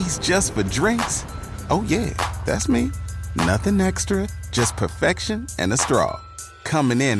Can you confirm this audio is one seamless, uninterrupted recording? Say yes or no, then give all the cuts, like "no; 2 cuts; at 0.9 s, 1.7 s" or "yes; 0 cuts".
yes; 0 cuts